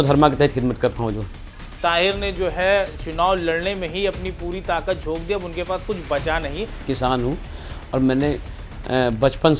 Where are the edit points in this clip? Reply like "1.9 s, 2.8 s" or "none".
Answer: 1.6 s, 6.8 s